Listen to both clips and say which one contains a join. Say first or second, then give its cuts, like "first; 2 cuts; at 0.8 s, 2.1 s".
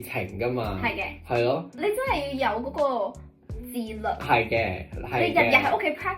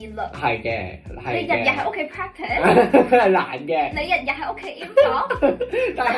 first; 1 cut; at 1.7 s